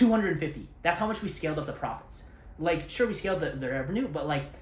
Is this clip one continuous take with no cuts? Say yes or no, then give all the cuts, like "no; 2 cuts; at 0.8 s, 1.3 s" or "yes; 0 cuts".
yes; 0 cuts